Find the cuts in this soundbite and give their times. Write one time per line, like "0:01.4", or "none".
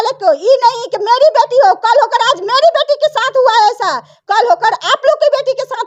none